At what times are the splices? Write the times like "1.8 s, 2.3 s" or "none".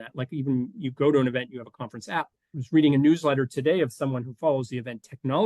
2.6 s